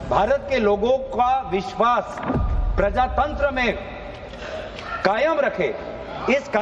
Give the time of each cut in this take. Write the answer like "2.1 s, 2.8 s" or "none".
5.2 s